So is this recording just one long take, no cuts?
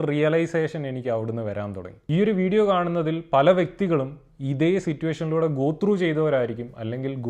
no; 1 cut; at 1.9 s

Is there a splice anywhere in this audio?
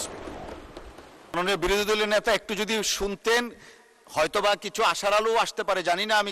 yes; 1 cut; at 1.4 s

